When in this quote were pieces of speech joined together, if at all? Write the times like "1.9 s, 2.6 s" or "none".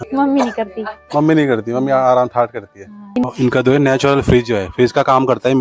3.2 s